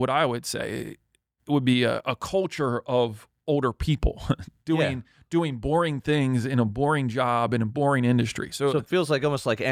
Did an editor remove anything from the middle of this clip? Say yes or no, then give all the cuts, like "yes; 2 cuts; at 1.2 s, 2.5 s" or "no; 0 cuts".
no; 0 cuts